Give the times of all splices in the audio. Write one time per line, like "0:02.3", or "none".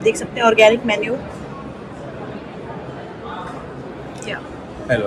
none